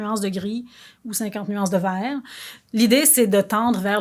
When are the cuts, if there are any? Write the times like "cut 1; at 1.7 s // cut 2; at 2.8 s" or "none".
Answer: none